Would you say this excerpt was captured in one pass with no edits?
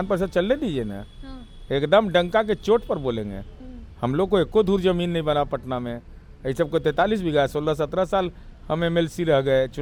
yes; 0 cuts

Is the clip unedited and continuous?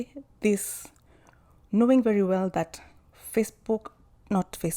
yes; 0 cuts

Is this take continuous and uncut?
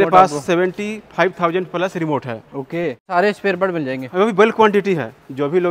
no; 1 cut; at 3.1 s

